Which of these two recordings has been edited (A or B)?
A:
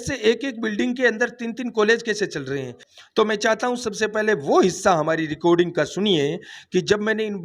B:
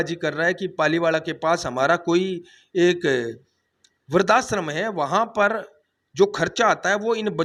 A